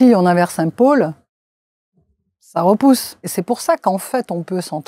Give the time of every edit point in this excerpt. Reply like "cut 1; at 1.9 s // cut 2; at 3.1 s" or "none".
cut 1; at 3.2 s

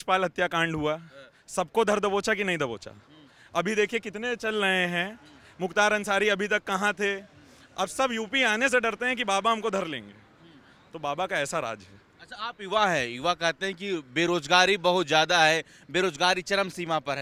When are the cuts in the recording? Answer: none

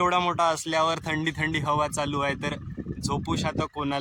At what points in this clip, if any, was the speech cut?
none

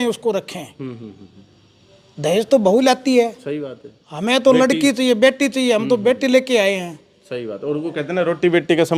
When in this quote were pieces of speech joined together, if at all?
none

